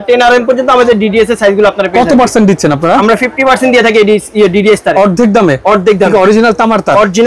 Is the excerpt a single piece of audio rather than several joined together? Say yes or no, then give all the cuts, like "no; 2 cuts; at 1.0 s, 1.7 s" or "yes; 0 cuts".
yes; 0 cuts